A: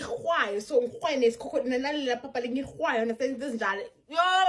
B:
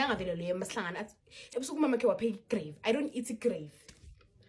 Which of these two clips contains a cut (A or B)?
B